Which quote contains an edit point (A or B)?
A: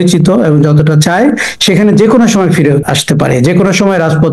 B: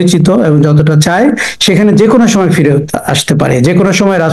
A